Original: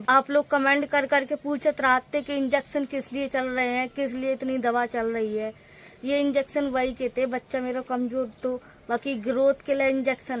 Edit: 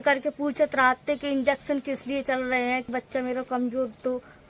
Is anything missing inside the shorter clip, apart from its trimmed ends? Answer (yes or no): yes